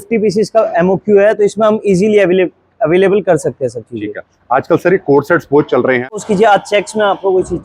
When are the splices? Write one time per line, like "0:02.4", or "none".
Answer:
0:06.2